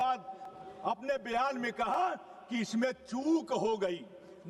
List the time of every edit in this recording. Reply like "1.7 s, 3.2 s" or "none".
none